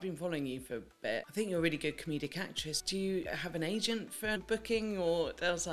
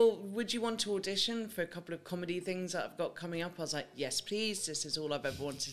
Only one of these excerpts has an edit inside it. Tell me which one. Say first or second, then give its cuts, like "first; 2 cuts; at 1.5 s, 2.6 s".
first; 3 cuts; at 1.3 s, 3.2 s, 4.4 s